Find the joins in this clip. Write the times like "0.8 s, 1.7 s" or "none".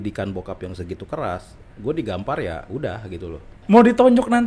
3.5 s